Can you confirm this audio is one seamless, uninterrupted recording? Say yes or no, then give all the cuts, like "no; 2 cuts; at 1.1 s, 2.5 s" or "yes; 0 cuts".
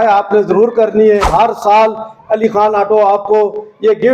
no; 1 cut; at 1.3 s